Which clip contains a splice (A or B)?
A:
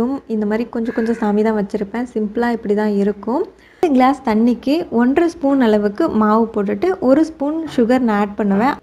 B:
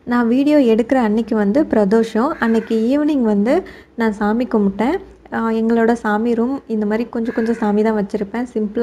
A